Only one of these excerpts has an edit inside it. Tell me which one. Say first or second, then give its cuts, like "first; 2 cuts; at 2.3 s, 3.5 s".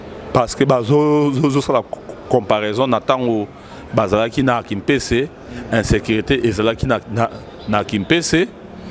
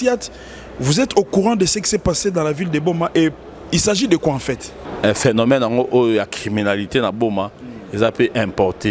second; 1 cut; at 4.8 s